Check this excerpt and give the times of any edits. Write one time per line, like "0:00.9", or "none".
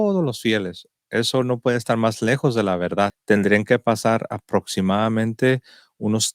0:03.2